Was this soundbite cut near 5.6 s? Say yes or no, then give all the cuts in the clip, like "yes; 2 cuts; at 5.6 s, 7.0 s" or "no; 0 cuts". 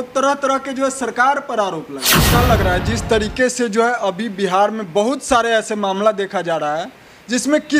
no; 1 cut; at 2.1 s